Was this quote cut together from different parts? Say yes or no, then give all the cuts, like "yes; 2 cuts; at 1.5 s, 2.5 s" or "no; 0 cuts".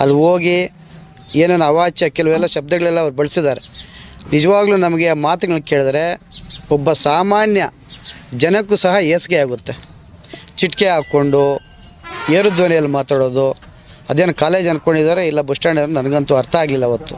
no; 0 cuts